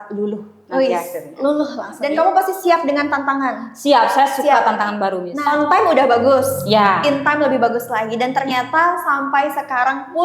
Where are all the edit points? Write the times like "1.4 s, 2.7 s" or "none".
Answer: 1.9 s, 5.3 s